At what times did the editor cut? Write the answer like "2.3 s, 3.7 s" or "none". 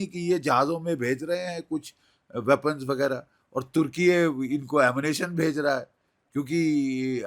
none